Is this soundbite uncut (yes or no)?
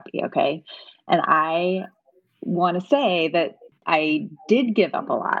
no